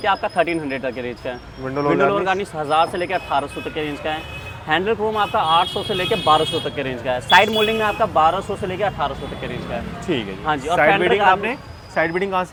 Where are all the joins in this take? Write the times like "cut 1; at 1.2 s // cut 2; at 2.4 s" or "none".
none